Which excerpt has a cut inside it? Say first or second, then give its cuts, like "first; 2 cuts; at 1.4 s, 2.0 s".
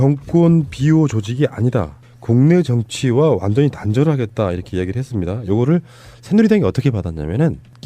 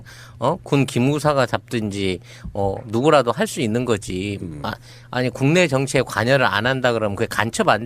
second; 1 cut; at 3.6 s